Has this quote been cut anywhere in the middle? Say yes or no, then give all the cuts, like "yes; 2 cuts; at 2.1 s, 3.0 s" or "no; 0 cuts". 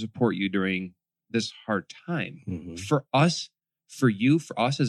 no; 0 cuts